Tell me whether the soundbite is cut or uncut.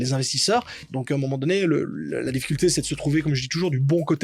cut